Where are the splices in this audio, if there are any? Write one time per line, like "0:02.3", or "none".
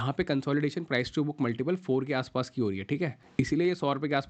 0:03.2